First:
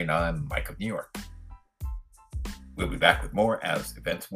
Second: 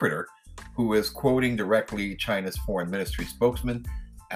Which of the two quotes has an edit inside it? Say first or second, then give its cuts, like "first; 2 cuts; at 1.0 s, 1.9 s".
first; 2 cuts; at 1.0 s, 2.7 s